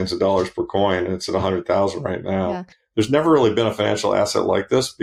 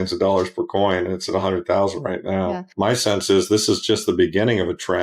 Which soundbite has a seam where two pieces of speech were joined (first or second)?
second